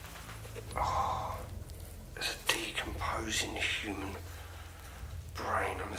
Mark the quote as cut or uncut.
uncut